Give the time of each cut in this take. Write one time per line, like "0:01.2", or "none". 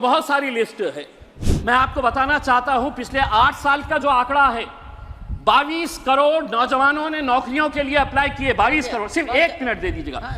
0:01.4